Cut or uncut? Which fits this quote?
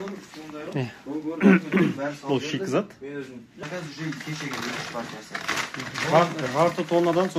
cut